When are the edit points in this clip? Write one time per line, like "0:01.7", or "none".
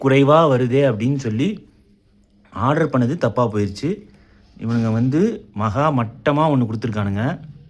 none